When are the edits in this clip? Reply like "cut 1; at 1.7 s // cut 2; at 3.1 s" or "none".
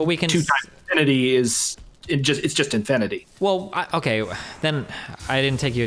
none